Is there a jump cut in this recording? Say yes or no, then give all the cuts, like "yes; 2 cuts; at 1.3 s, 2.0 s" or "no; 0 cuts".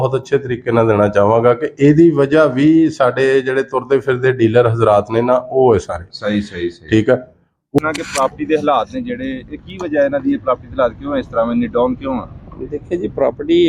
yes; 1 cut; at 7.8 s